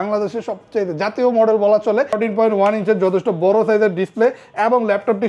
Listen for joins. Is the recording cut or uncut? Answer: cut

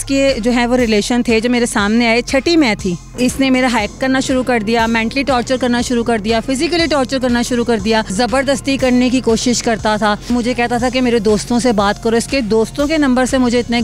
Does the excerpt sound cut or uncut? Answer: cut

